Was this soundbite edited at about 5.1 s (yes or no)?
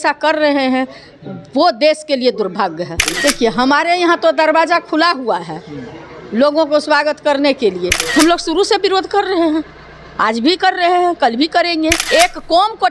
no